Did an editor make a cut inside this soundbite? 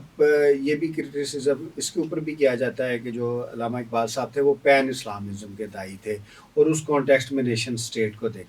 no; 0 cuts

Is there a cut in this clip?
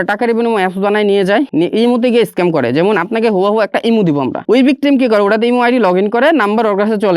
yes; 2 cuts; at 1.5 s, 4.4 s

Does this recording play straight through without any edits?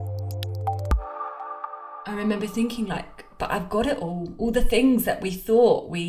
no; 1 cut; at 1.9 s

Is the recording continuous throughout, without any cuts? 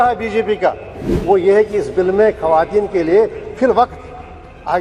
no; 1 cut; at 1.1 s

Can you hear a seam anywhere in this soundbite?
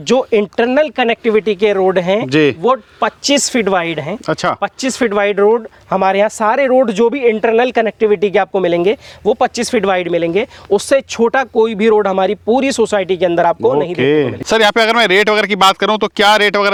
no; 0 cuts

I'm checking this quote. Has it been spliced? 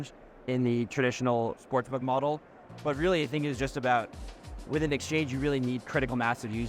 yes; 1 cut; at 1.6 s

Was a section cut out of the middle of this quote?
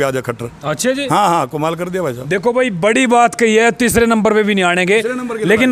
no; 0 cuts

